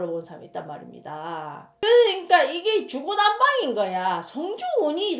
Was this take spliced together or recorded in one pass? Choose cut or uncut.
cut